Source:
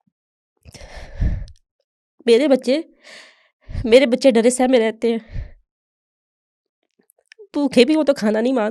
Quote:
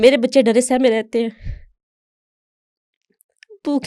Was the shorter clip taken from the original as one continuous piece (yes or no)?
yes